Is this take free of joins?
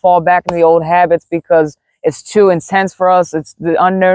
yes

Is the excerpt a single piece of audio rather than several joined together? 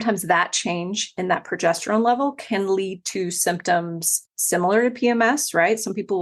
no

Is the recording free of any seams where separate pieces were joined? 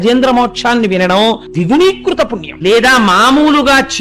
no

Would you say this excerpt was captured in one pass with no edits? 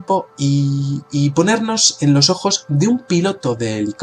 no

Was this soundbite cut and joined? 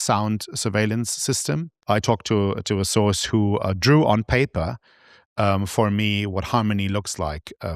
yes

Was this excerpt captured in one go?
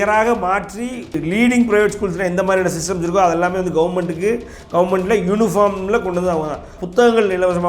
no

